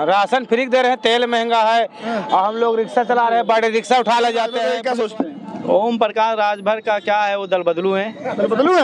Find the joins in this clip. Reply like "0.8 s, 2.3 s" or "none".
4.7 s